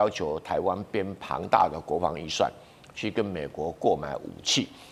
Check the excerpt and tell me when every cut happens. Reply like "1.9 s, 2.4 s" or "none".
none